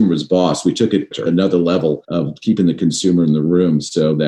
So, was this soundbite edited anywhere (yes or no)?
yes